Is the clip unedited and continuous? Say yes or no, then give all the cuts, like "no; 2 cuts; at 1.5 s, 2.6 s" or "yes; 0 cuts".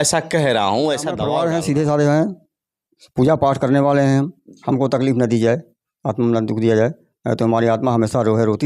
no; 1 cut; at 1.2 s